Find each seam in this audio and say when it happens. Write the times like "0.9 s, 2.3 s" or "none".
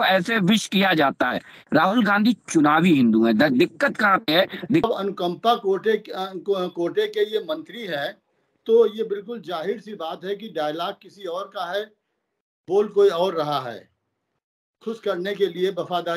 4.8 s